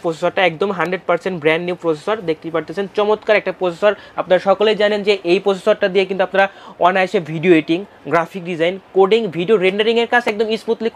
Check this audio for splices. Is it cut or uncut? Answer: uncut